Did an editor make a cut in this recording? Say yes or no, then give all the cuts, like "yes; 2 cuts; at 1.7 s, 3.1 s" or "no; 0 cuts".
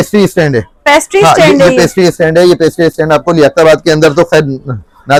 no; 0 cuts